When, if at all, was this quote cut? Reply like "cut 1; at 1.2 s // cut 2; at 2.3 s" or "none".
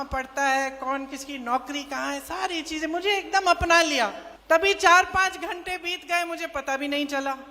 cut 1; at 4.3 s